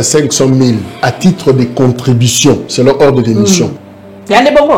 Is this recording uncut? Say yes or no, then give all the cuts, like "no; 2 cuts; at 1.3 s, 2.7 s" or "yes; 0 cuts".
no; 1 cut; at 3.8 s